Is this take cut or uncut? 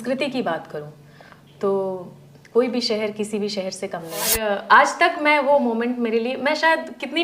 cut